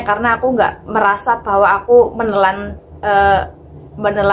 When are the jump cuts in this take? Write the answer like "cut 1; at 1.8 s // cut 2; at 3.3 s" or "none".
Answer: none